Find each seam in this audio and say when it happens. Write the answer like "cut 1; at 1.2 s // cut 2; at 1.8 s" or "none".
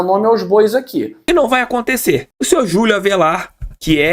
cut 1; at 1.3 s